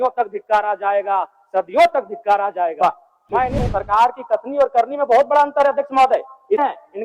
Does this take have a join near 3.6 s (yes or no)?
yes